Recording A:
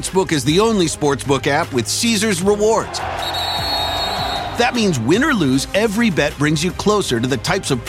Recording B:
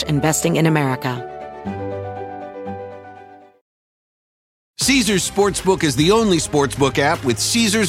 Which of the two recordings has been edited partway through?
B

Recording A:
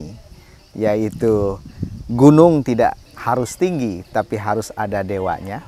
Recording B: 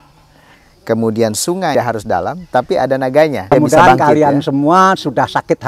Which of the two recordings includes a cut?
B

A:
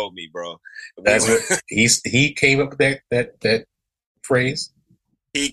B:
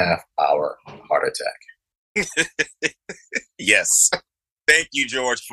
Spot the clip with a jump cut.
B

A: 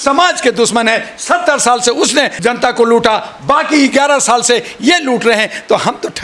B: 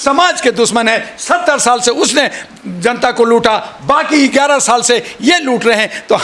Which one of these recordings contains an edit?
A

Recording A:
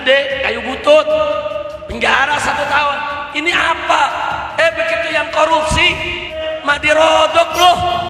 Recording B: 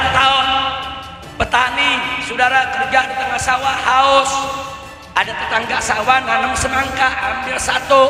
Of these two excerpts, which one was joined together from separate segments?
A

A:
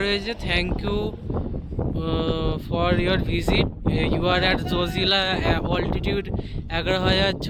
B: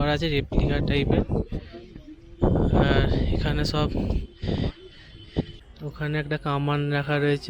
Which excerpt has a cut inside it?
B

